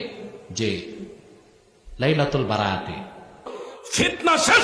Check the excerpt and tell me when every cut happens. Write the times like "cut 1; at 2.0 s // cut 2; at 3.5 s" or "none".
cut 1; at 3.6 s